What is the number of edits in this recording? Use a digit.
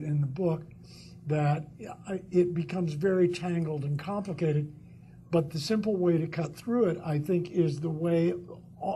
0